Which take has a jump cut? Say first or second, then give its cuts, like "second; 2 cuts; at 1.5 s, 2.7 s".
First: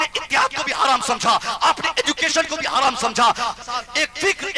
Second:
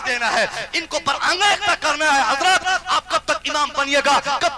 first; 1 cut; at 3.6 s